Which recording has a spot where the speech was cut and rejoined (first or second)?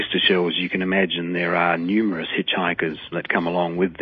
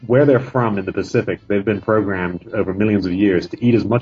first